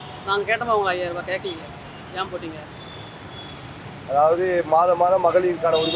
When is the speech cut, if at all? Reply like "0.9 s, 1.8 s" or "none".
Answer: none